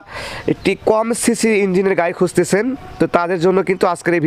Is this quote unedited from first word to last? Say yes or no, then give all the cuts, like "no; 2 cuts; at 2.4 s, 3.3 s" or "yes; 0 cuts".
yes; 0 cuts